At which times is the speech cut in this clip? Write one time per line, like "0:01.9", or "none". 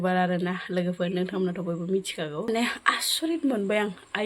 0:02.5